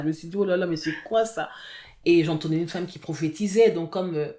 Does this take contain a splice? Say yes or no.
no